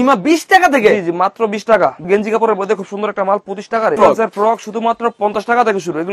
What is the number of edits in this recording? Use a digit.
2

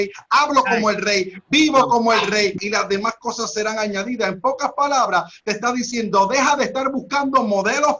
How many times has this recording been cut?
1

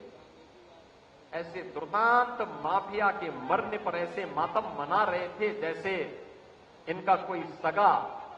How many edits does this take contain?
0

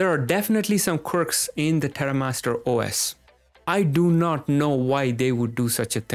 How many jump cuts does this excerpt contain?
1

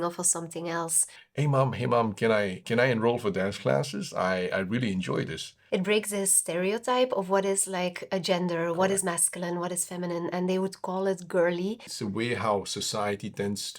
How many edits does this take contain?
3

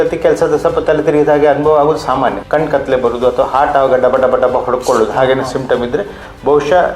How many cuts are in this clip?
1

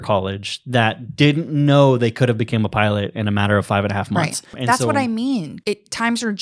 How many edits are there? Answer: 2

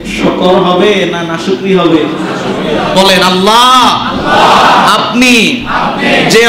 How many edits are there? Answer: 1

